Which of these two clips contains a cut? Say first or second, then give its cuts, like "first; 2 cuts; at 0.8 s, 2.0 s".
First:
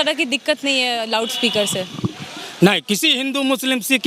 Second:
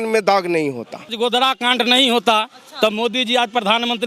second; 1 cut; at 1.1 s